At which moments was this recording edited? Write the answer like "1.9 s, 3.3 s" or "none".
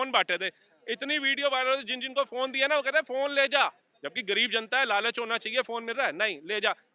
none